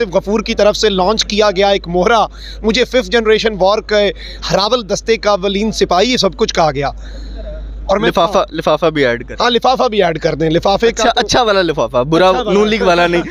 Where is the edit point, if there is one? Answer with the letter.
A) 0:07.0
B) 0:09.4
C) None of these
C